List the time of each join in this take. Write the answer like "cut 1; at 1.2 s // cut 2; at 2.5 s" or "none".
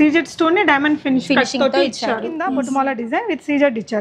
cut 1; at 2.5 s